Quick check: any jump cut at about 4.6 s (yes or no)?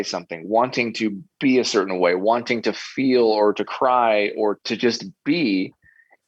yes